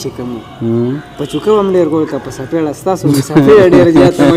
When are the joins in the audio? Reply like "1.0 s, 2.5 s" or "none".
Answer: none